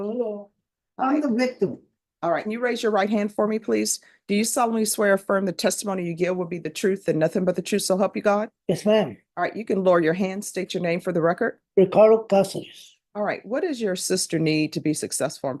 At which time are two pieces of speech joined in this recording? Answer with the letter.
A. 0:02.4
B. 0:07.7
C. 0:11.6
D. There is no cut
A